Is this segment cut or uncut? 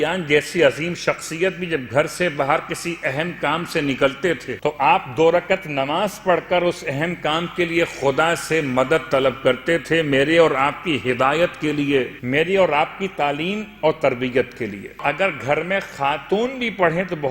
cut